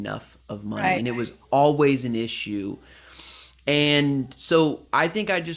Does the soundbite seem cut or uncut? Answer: uncut